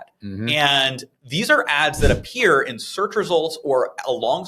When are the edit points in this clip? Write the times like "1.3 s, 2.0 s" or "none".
none